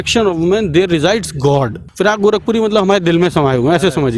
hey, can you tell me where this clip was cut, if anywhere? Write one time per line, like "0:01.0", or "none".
0:01.8